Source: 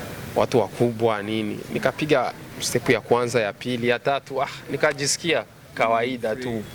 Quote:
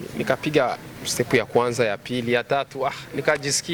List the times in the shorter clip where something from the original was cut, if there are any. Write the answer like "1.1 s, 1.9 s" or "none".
none